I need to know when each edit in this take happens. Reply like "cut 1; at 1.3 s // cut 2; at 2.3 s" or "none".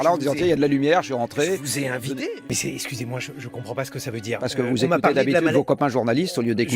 cut 1; at 2.3 s